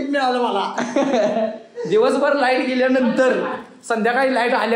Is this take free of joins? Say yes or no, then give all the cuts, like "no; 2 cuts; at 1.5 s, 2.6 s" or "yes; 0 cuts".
yes; 0 cuts